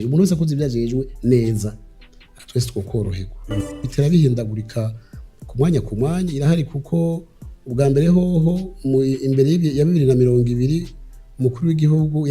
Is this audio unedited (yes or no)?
no